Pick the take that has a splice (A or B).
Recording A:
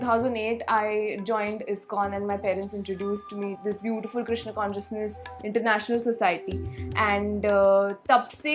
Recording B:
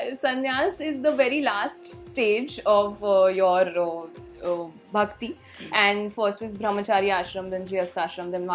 A